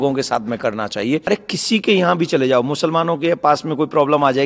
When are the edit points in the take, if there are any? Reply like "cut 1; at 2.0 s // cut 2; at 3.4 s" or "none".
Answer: cut 1; at 1.2 s